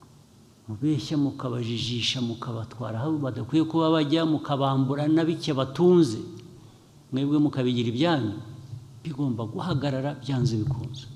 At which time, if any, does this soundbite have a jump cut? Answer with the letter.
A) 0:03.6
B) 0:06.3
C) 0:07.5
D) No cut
D